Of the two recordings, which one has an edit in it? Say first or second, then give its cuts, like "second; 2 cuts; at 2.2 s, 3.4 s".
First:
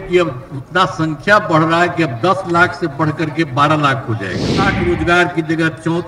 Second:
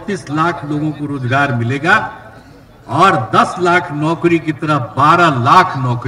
first; 1 cut; at 4.7 s